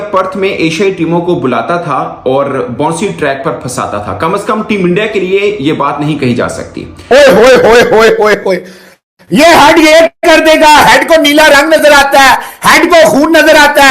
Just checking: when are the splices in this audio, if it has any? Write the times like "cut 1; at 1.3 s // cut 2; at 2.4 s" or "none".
cut 1; at 6.9 s